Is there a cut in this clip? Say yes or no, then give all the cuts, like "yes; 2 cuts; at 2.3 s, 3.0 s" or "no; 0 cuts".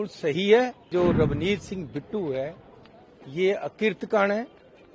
yes; 1 cut; at 0.9 s